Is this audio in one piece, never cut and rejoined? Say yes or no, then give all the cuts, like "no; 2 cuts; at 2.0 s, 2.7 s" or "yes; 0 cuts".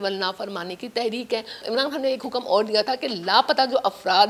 no; 1 cut; at 1.6 s